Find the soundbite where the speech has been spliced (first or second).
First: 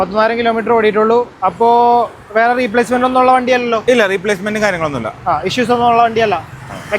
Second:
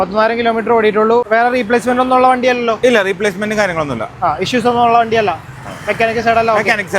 second